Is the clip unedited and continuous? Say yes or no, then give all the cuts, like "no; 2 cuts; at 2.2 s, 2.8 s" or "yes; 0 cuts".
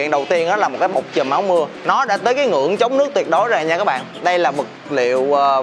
no; 1 cut; at 1.8 s